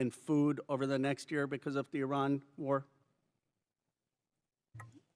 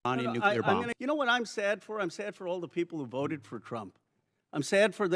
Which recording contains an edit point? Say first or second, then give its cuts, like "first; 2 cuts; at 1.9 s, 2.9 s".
second; 1 cut; at 0.9 s